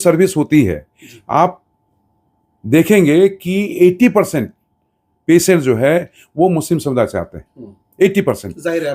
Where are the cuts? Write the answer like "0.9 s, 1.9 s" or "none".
none